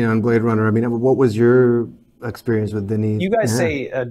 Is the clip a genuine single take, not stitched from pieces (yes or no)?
no